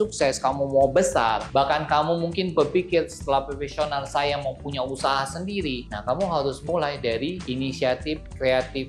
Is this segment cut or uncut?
uncut